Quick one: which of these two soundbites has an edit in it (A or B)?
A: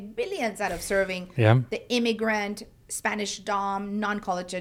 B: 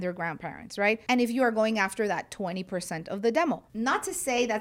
B